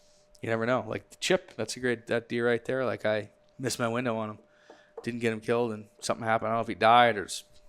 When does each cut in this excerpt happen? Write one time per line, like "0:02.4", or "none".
0:03.4

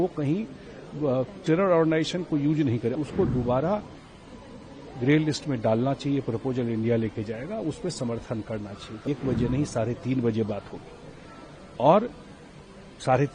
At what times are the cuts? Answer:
0:02.9
0:09.1

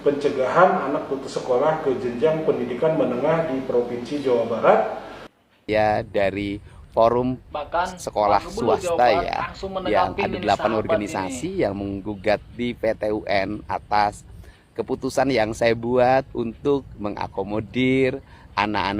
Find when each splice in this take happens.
0:05.6

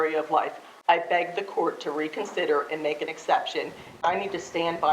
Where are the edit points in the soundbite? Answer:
0:04.0

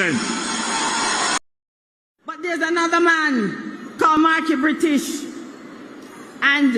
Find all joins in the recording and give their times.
0:01.4

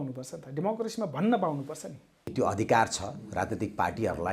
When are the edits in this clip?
0:02.2

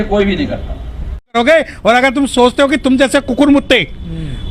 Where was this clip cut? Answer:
0:01.3

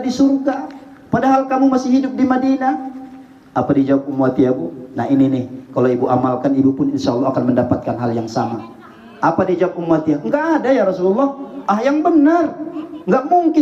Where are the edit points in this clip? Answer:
none

